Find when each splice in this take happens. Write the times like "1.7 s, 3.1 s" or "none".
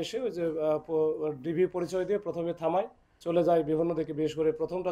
3.1 s